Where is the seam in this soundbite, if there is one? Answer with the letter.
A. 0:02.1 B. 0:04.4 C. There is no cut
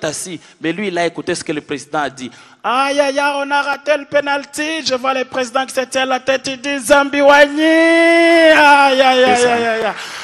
C